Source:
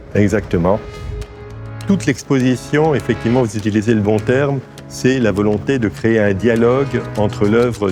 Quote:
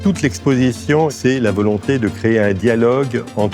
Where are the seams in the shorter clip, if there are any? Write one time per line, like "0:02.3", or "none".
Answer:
0:01.1